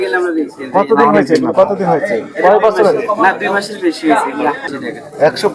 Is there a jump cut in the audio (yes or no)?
yes